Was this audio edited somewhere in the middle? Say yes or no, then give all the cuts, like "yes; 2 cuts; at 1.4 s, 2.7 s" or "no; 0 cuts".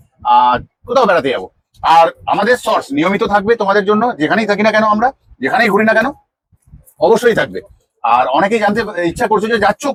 no; 0 cuts